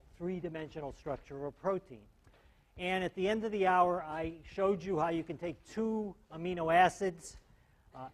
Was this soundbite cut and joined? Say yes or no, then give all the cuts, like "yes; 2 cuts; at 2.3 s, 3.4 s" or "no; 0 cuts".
no; 0 cuts